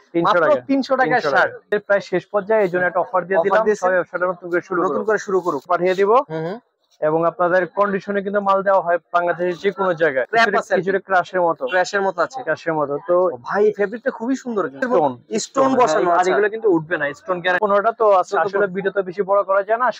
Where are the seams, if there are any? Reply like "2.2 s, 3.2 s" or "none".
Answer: 1.7 s, 5.7 s, 10.3 s, 14.8 s, 17.6 s